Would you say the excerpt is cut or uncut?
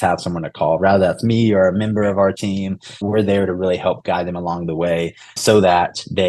cut